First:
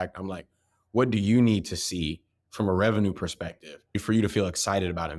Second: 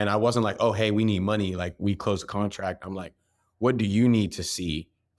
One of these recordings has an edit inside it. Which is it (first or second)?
first